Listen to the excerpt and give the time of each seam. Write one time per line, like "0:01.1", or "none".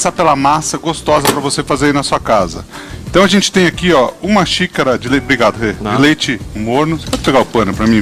0:02.2